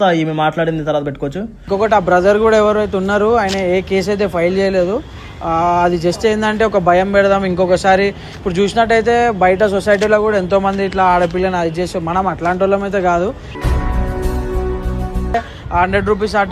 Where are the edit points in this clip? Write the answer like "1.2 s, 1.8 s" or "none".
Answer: 1.5 s, 15.3 s